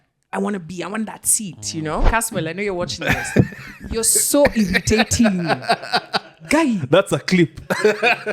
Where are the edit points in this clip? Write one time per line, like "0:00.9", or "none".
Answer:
0:02.1